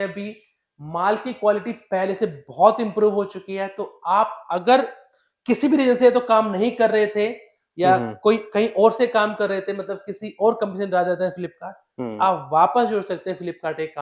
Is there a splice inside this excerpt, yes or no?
no